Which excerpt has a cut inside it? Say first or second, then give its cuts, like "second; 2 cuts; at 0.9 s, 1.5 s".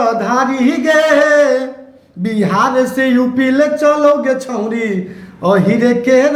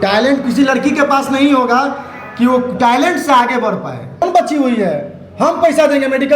second; 1 cut; at 4.2 s